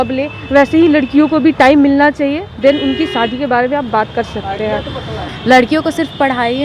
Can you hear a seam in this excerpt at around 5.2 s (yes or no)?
yes